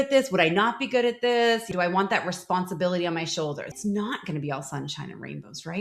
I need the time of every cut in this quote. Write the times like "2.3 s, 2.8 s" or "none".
1.7 s, 3.7 s